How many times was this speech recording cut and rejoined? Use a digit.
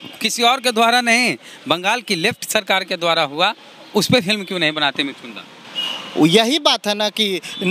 0